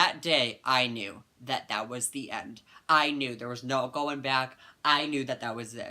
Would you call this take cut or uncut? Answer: uncut